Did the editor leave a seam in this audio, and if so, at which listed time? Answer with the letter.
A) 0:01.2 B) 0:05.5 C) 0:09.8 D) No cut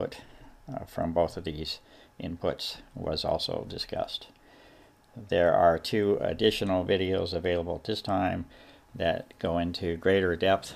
C